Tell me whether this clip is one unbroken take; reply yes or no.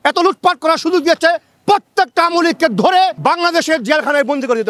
no